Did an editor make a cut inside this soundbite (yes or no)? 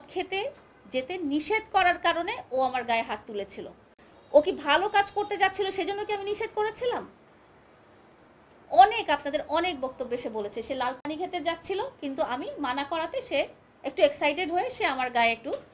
no